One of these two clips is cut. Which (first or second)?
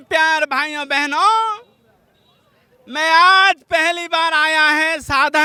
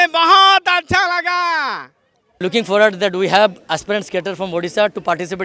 second